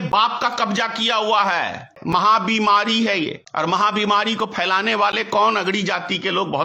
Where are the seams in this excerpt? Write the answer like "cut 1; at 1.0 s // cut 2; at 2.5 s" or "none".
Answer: cut 1; at 2.0 s // cut 2; at 3.4 s